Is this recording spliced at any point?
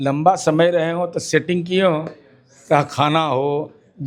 no; 0 cuts

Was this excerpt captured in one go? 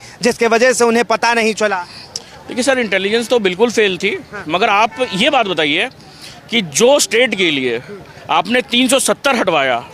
yes; 0 cuts

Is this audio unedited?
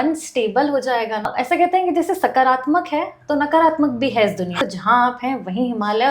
no; 2 cuts; at 1.3 s, 4.6 s

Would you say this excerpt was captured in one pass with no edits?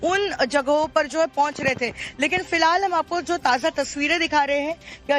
no; 1 cut; at 3.2 s

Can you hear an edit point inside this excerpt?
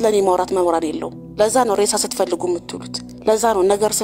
yes; 1 cut; at 1.2 s

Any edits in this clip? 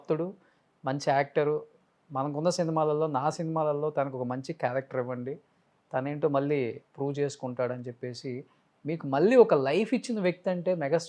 no; 0 cuts

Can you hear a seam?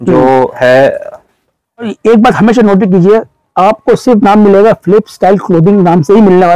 yes; 1 cut; at 1.9 s

